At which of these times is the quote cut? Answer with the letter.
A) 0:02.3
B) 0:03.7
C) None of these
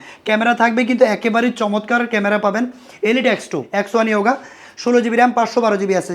B